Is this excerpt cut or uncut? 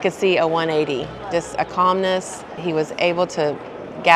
cut